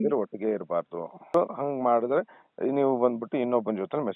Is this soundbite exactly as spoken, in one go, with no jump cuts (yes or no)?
no